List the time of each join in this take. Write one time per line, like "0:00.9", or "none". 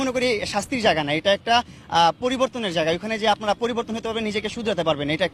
none